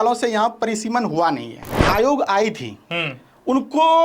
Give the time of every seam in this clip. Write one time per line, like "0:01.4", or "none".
0:01.8